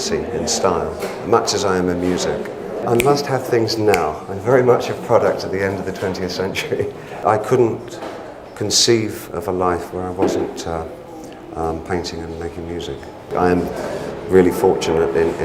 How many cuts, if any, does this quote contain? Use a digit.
3